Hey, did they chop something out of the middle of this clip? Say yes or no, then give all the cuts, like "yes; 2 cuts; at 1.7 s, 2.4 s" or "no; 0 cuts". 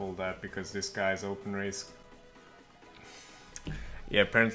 no; 0 cuts